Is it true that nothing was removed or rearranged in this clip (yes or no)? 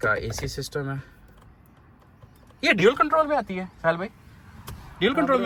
yes